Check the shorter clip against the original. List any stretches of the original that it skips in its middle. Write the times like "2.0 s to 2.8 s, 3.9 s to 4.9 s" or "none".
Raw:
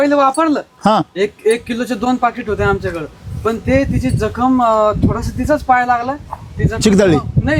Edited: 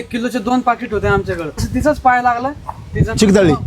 3.2 s to 5.2 s